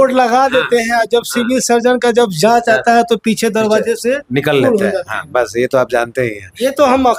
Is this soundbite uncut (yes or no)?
yes